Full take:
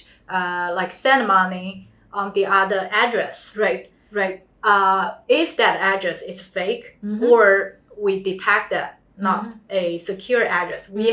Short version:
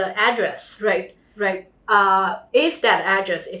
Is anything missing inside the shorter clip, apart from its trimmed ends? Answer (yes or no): no